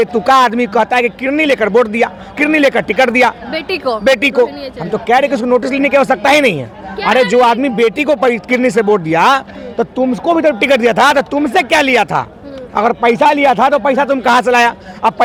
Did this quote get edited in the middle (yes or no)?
no